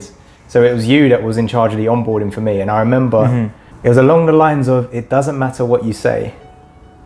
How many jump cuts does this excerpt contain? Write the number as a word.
one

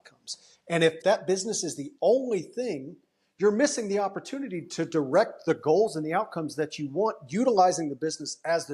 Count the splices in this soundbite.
one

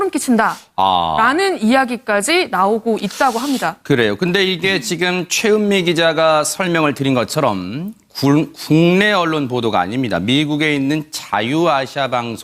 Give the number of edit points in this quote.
one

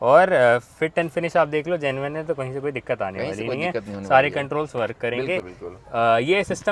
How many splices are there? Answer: zero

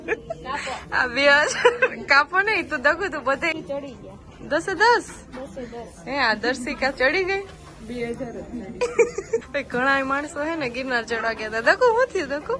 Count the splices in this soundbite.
two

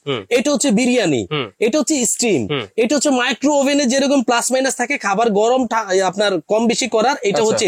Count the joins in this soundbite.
zero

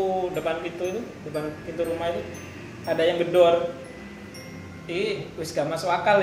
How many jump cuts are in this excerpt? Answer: zero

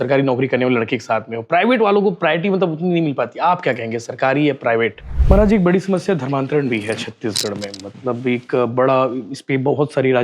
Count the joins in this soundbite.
one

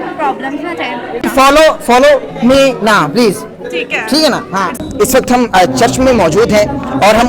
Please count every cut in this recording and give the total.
two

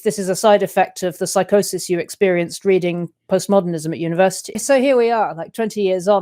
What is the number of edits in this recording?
one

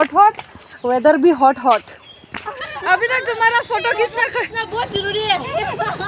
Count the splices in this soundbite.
one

